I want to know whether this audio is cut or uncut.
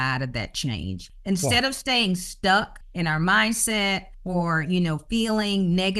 cut